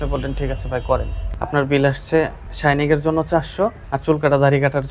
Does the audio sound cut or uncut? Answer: cut